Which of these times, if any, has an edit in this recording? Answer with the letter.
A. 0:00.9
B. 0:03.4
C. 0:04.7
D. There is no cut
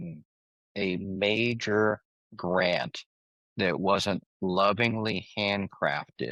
D